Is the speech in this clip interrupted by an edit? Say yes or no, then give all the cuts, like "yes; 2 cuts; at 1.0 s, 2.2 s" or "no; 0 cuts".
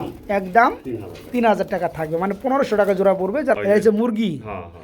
yes; 1 cut; at 3.5 s